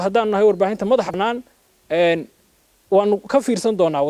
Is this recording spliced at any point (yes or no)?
yes